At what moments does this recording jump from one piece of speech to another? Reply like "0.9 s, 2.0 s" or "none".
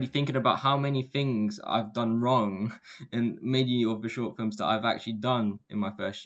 none